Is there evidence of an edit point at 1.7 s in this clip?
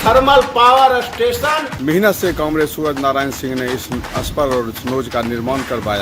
yes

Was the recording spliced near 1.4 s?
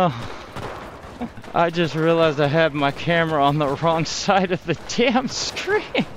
yes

